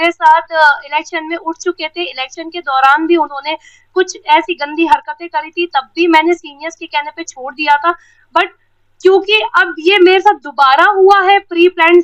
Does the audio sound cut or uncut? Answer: uncut